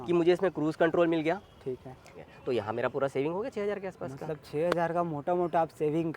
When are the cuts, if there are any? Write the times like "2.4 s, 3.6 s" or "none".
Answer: 2.1 s